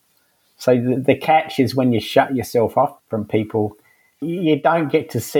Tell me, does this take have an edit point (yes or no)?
yes